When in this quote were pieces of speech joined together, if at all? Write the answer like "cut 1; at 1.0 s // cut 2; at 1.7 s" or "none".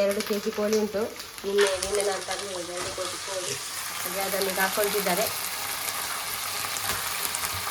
none

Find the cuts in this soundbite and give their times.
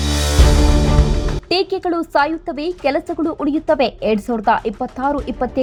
none

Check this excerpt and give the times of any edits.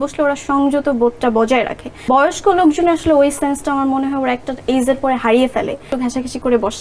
cut 1; at 2.0 s // cut 2; at 5.9 s

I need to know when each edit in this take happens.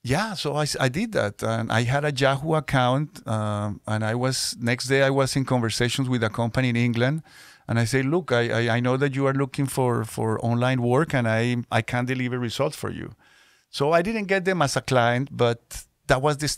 none

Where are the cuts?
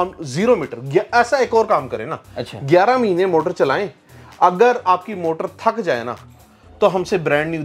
none

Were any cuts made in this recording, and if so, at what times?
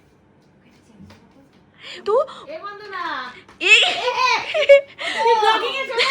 cut 1; at 2.0 s

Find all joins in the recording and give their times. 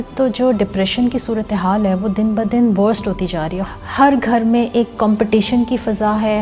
cut 1; at 3.6 s

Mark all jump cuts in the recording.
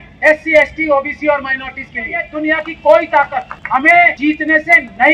cut 1; at 2.2 s // cut 2; at 3.6 s // cut 3; at 4.1 s

